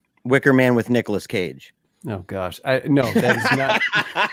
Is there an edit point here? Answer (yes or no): no